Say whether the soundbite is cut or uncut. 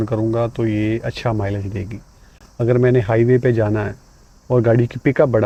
uncut